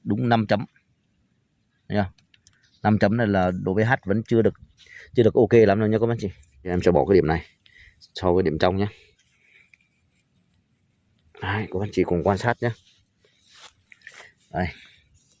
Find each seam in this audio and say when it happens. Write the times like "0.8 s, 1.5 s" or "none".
6.7 s